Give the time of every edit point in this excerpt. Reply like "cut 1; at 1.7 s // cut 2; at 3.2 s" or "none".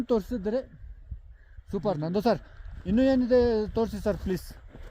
none